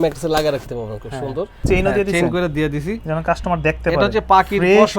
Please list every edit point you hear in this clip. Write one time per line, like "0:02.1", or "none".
0:01.6